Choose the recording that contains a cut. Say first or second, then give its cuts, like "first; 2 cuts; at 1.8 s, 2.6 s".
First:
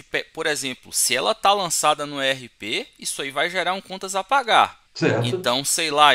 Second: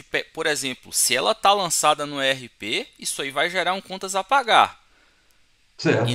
first; 1 cut; at 4.8 s